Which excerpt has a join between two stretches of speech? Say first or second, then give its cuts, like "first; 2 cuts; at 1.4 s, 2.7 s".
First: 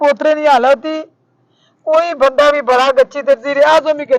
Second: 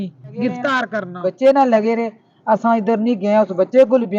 second; 1 cut; at 1.0 s